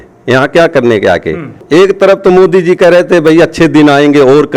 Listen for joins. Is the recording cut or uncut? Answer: cut